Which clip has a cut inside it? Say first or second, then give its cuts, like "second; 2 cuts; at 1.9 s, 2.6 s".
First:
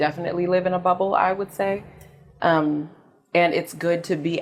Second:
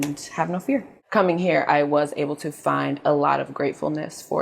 second; 1 cut; at 1.0 s